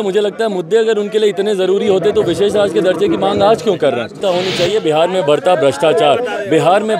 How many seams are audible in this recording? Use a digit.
1